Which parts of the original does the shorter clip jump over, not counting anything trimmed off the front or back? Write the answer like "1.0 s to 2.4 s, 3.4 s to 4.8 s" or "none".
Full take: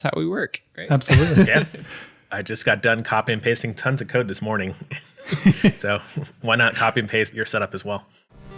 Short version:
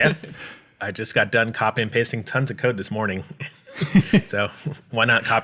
none